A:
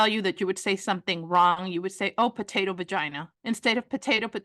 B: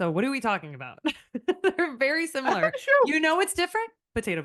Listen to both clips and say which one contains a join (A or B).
A